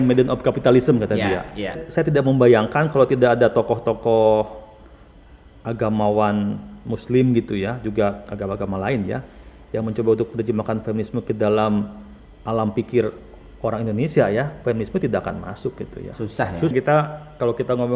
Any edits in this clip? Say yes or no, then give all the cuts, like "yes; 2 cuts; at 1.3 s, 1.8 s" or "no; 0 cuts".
yes; 2 cuts; at 1.8 s, 16.7 s